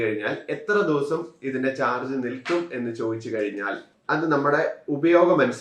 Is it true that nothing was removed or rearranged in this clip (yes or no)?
yes